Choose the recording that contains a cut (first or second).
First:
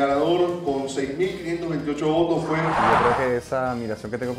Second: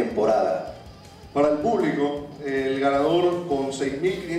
first